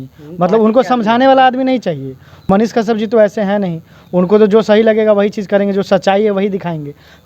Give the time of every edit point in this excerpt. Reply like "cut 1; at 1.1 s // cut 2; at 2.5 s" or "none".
cut 1; at 2.5 s